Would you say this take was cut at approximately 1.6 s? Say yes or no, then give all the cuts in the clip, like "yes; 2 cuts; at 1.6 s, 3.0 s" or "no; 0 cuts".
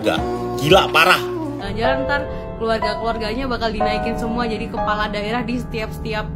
yes; 1 cut; at 1.6 s